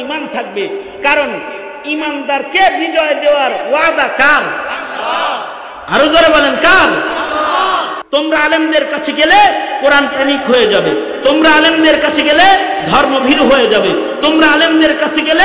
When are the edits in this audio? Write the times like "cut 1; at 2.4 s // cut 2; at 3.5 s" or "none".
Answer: cut 1; at 8.0 s